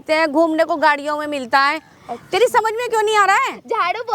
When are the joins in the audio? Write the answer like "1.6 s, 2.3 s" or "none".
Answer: none